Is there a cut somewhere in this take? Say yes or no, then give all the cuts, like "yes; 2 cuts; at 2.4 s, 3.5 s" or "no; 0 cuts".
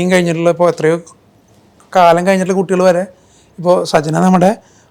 no; 0 cuts